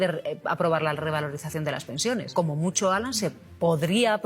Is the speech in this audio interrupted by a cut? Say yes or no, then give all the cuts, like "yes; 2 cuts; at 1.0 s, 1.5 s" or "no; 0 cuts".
yes; 1 cut; at 2.3 s